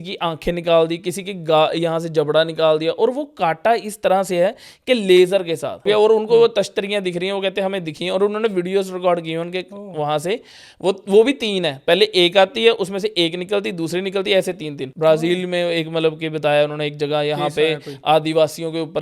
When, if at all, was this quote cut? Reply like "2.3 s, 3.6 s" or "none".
5.8 s, 14.8 s